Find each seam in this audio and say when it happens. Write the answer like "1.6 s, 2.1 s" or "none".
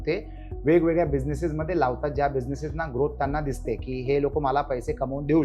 none